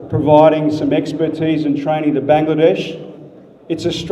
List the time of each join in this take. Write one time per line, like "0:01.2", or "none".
none